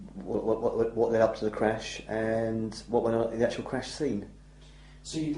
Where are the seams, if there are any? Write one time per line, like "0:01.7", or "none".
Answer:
0:03.6

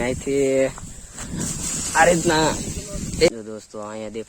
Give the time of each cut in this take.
0:03.3

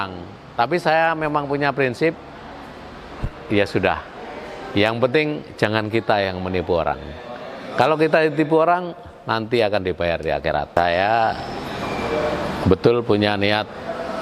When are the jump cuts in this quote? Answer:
0:10.8

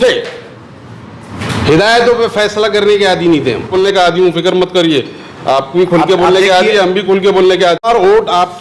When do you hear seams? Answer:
0:03.7
0:07.9

